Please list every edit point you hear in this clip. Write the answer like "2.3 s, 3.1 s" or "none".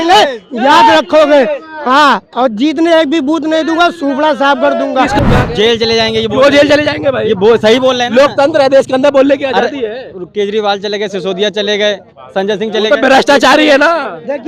5.2 s